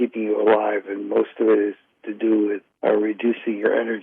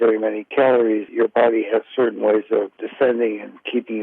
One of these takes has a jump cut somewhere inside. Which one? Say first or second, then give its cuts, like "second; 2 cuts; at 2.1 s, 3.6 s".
second; 2 cuts; at 1.1 s, 2.8 s